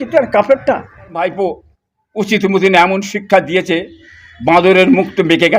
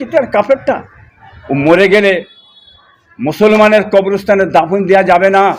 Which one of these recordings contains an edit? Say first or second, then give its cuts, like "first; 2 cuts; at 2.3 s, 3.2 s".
first; 1 cut; at 1.2 s